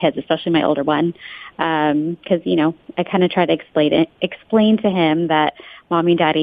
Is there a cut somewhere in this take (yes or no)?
no